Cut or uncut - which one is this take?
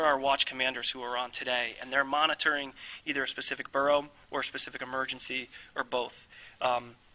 cut